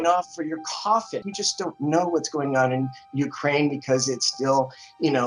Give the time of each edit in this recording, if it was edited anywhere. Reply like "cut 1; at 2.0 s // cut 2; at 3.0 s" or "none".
cut 1; at 1.3 s

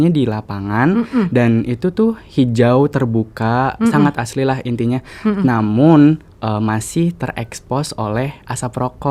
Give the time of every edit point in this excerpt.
none

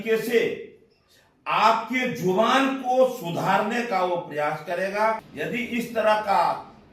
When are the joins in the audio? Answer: cut 1; at 5.3 s

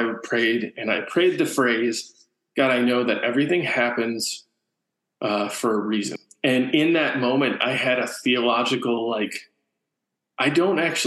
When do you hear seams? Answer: cut 1; at 6.1 s

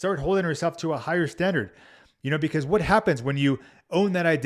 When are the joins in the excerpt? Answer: none

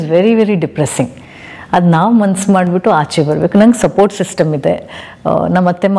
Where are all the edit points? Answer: none

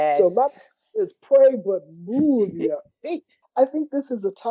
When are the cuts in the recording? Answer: cut 1; at 3.4 s

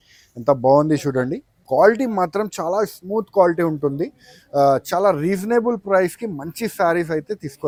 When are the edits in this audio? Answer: none

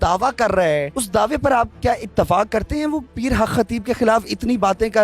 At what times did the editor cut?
cut 1; at 1.0 s

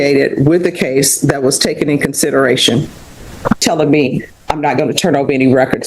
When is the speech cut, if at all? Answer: cut 1; at 3.6 s

